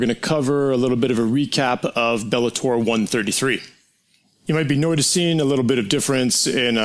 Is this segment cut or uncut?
uncut